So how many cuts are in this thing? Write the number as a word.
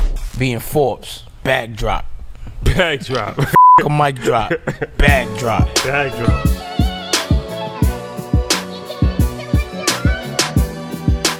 zero